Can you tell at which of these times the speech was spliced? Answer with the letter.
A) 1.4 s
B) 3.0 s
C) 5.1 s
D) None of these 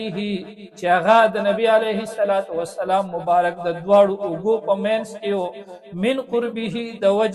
D